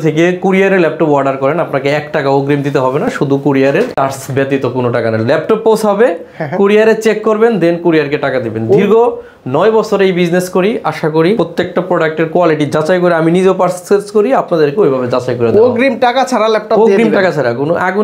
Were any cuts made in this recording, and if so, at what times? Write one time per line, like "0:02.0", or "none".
none

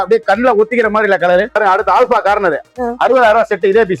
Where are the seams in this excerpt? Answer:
0:01.6

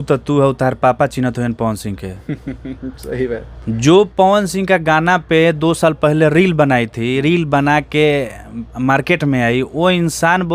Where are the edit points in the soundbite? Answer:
none

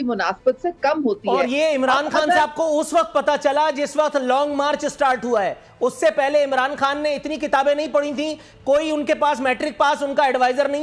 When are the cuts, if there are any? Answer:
none

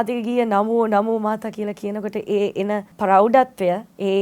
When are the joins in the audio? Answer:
0:02.9

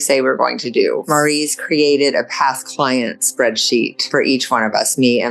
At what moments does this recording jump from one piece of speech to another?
0:01.0
0:04.0

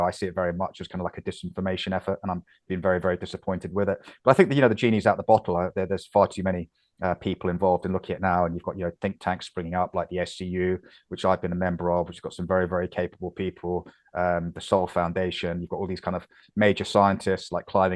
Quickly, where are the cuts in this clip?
none

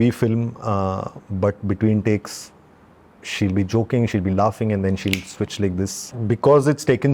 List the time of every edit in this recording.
0:06.1

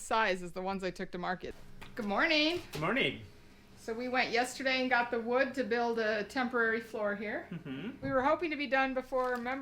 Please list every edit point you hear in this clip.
0:01.9
0:08.0

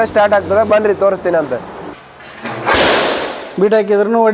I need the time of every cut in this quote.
0:01.7

